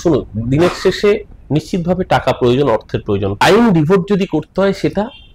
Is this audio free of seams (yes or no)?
no